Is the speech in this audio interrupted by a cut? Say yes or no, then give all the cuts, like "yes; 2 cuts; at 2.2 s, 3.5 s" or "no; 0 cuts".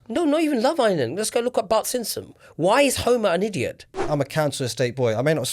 yes; 1 cut; at 4.0 s